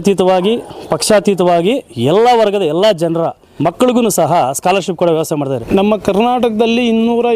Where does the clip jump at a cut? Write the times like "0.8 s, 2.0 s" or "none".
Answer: 3.4 s, 5.6 s